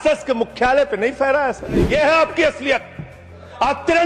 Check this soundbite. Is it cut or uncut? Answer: cut